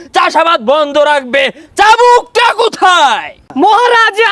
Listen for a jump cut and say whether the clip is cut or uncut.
cut